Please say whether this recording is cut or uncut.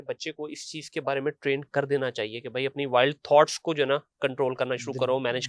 uncut